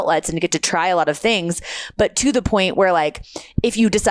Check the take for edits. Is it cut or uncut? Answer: uncut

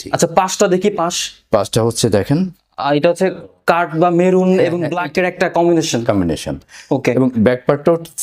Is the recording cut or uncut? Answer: uncut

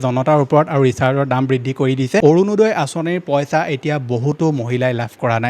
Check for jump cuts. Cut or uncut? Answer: cut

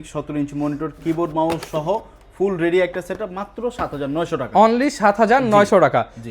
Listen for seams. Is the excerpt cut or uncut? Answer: uncut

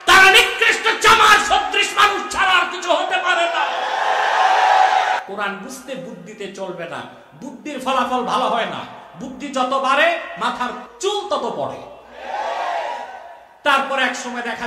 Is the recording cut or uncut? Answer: cut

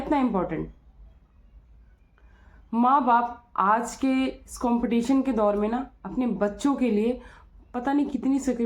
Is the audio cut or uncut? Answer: uncut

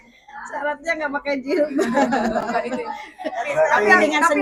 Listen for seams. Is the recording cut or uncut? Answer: uncut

